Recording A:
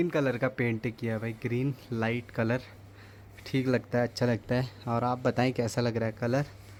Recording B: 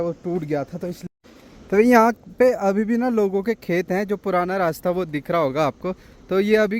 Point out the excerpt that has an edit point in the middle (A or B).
B